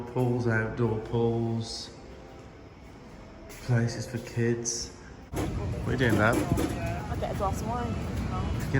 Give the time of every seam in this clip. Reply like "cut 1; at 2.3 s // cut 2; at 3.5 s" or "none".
none